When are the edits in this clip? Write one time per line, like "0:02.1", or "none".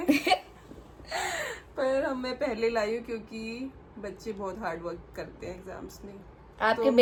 none